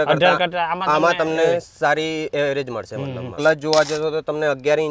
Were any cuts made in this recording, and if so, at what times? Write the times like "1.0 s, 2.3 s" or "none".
3.3 s

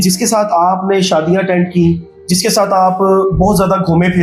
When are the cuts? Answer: none

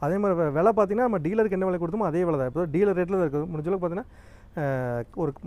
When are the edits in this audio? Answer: none

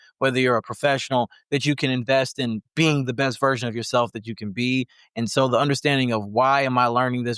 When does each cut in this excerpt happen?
2.6 s

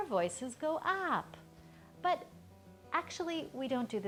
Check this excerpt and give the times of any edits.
none

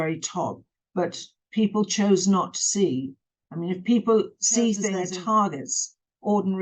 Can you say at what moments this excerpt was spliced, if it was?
5.0 s

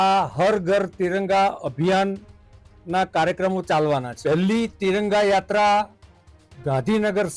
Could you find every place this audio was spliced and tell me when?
4.1 s

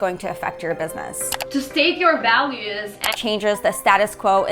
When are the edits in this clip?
1.4 s, 3.2 s

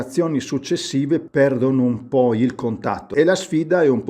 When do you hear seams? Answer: 1.3 s, 3.0 s

